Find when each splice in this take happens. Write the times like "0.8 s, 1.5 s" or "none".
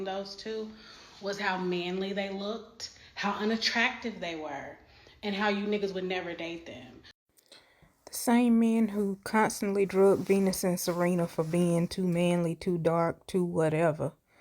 7.2 s